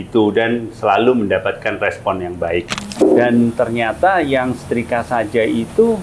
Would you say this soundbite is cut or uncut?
cut